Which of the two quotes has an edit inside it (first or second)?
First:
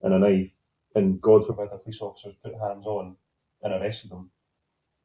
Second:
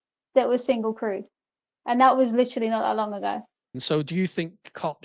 second